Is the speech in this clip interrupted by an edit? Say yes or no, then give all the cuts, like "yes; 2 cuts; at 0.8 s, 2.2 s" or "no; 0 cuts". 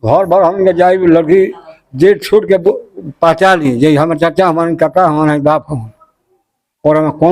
no; 0 cuts